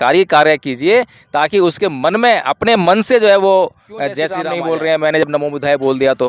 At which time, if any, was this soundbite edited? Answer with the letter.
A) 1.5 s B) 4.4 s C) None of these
B